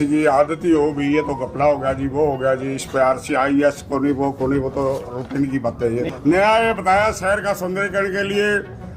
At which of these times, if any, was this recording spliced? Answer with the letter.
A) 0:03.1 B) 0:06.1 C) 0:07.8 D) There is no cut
B